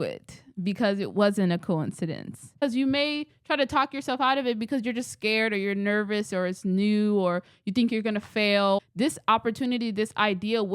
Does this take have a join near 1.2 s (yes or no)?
no